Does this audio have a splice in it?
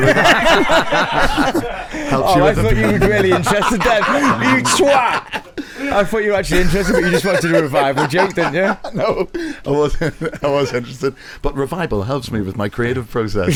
no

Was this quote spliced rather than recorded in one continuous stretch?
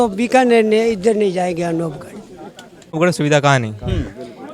yes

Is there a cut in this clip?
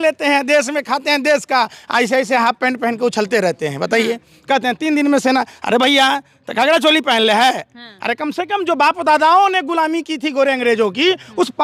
no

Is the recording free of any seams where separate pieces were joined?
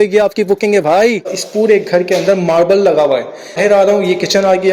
no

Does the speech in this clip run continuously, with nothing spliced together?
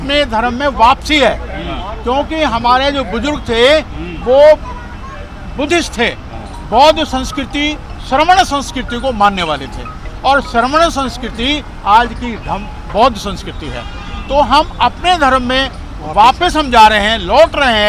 yes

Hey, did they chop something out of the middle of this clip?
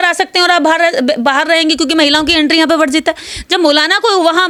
no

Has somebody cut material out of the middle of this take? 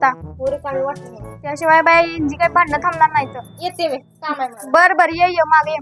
no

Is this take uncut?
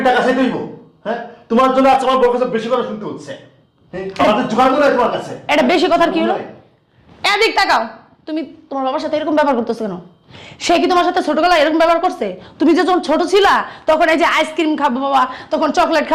yes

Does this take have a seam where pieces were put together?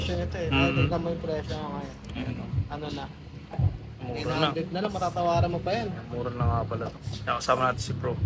no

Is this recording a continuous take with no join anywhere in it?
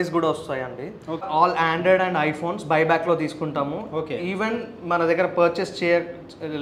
no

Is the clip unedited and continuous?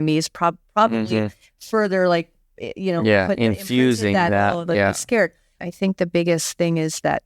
no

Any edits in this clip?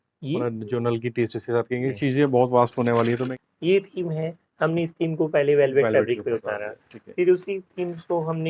yes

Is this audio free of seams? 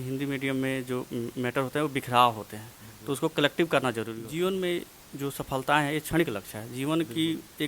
no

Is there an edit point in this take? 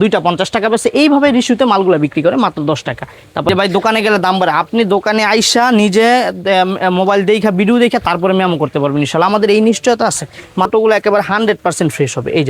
yes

